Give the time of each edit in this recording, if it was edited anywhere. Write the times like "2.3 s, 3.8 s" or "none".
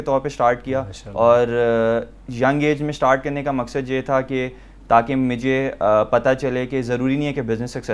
none